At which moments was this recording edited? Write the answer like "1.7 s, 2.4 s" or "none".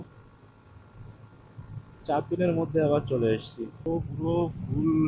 3.6 s